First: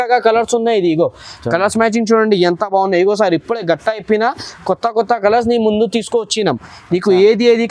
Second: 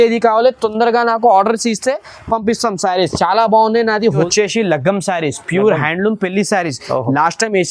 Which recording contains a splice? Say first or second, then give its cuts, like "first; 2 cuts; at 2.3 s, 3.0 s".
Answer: second; 1 cut; at 4.2 s